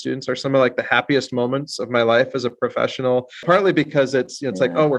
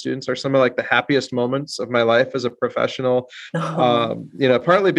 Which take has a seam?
first; 1 cut; at 3.4 s

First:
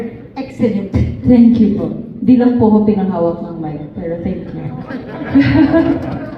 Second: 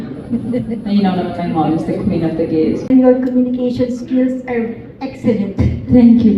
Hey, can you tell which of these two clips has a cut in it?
second; 1 cut; at 2.9 s

